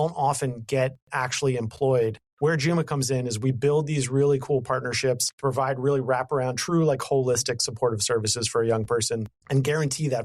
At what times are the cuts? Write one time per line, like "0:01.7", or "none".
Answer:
0:02.2
0:05.3
0:09.3